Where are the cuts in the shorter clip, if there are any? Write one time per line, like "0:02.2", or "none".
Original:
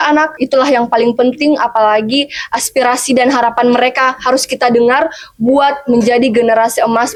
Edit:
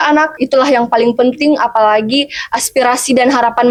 none